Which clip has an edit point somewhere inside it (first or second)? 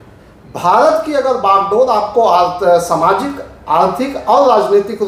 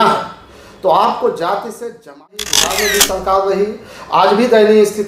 second